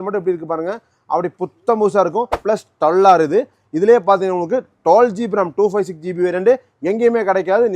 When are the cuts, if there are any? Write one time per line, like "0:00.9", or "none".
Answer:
0:02.4